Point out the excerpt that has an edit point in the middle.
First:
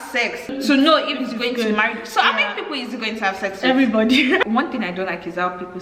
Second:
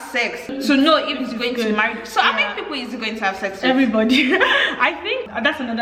first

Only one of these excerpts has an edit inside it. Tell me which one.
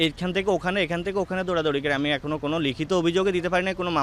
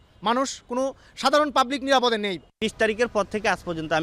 second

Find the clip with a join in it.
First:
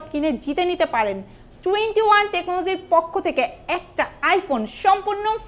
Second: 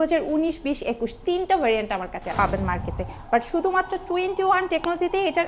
second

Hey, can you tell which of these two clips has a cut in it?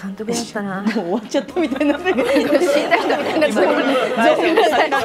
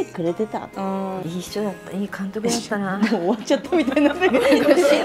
second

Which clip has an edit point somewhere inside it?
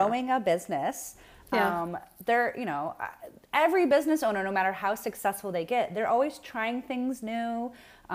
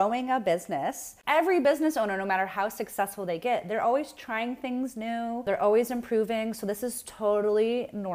second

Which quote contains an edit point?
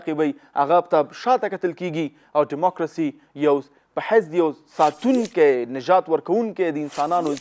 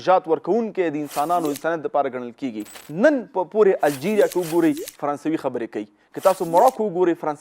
second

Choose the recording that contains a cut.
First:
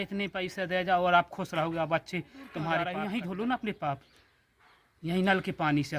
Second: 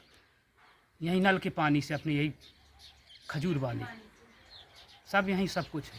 first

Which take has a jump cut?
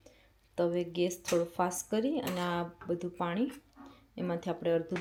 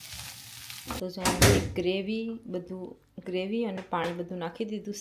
second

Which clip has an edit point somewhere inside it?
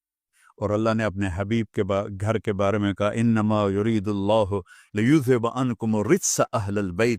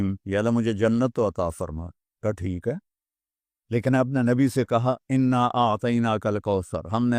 second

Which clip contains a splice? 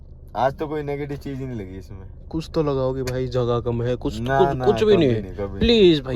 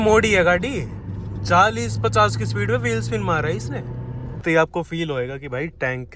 second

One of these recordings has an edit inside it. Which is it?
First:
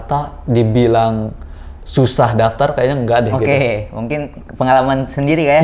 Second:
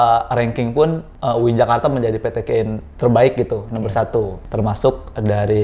second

